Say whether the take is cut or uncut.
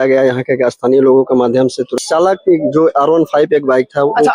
cut